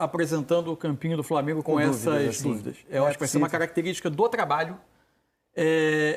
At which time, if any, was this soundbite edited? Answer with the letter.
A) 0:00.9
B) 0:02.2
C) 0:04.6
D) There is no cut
D